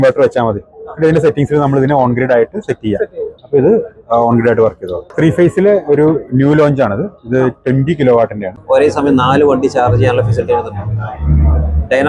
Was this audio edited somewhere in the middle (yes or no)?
yes